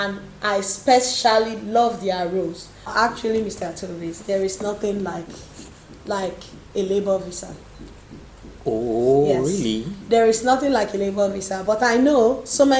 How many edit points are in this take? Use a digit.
1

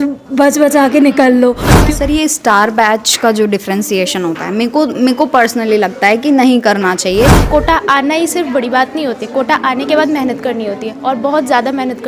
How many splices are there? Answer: 2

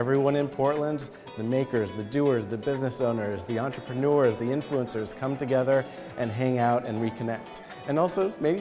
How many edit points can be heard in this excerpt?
0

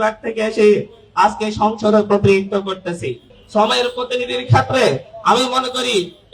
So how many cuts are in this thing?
0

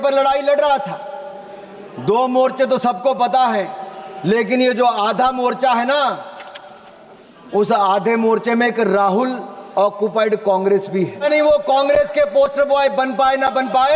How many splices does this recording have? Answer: 1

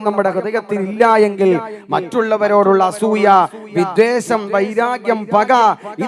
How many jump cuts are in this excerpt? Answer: 0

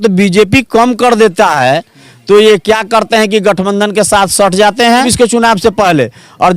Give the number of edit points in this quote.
1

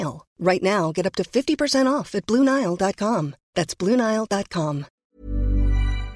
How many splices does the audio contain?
1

